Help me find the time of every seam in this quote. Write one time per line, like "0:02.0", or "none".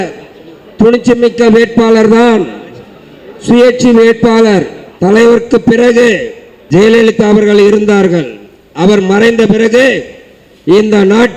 0:04.8